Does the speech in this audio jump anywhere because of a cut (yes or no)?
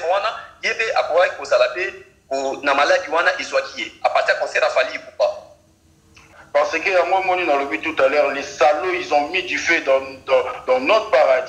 yes